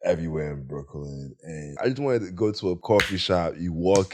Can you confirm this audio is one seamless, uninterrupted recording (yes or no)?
no